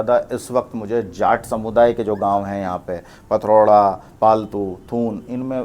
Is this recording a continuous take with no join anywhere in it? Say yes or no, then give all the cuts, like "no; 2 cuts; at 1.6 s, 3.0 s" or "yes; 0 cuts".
yes; 0 cuts